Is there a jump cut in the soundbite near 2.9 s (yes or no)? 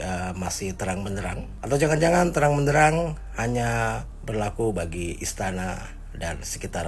no